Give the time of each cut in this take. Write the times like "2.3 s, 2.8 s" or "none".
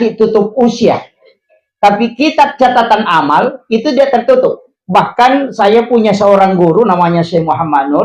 none